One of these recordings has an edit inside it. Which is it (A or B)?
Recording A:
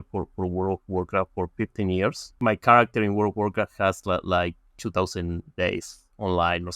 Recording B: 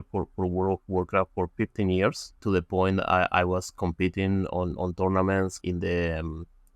A